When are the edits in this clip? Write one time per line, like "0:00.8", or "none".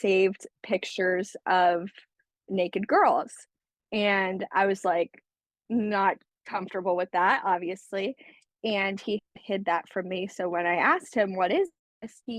none